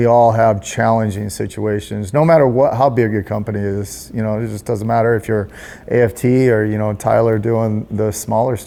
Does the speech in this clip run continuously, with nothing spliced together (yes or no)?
yes